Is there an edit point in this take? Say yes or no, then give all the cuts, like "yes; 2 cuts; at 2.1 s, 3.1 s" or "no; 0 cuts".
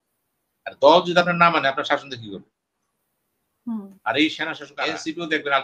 yes; 1 cut; at 4.6 s